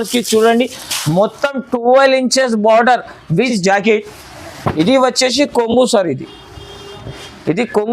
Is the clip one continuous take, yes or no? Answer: no